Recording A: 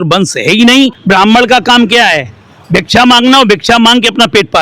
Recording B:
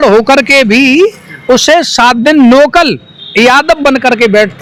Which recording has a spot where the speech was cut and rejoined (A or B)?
A